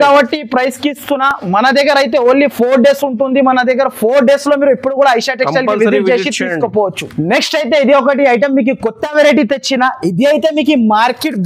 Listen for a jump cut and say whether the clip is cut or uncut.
uncut